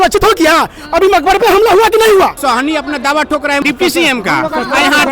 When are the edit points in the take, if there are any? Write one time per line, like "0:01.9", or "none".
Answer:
0:02.4
0:03.6